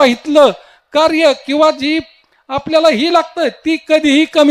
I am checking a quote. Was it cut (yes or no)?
no